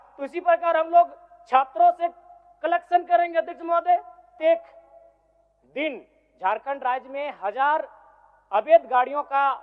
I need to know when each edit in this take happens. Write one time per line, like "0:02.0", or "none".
0:04.4